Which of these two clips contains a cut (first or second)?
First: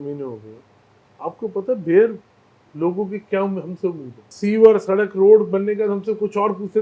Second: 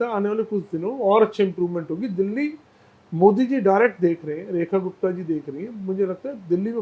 first